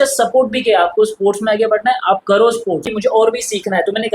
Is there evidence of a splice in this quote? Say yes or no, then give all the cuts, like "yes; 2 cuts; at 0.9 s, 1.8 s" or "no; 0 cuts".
yes; 1 cut; at 2.9 s